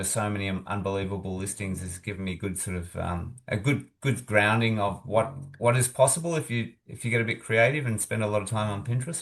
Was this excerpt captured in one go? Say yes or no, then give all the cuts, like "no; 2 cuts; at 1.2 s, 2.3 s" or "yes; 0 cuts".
yes; 0 cuts